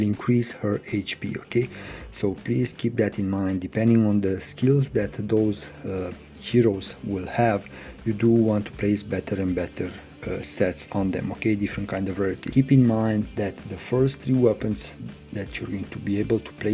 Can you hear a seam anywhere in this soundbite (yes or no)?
yes